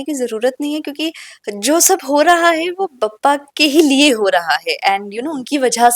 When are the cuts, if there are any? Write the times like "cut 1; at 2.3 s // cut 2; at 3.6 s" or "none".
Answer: none